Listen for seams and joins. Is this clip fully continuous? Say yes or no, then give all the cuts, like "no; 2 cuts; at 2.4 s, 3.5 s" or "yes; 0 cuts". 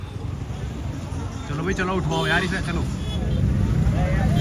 no; 1 cut; at 3.2 s